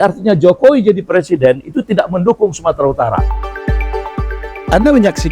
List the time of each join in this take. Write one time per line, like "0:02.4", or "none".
0:03.4